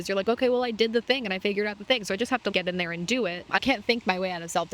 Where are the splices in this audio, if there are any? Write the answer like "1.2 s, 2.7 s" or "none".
3.6 s